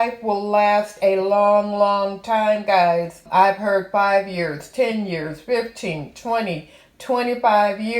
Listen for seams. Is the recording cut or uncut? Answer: cut